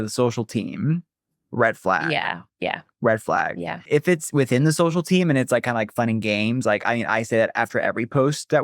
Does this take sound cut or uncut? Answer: cut